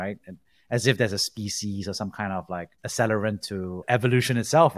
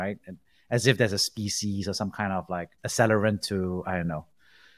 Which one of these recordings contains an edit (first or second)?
first